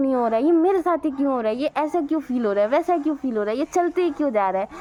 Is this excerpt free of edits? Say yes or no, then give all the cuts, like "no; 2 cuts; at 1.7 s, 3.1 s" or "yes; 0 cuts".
yes; 0 cuts